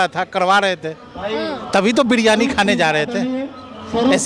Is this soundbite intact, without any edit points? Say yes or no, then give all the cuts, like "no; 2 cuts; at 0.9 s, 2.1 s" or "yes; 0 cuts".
yes; 0 cuts